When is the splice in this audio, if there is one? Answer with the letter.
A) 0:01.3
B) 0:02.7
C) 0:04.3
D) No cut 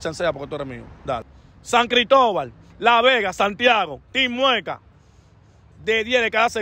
A